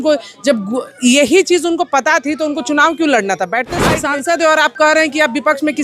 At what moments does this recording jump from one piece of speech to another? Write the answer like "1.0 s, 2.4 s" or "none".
3.8 s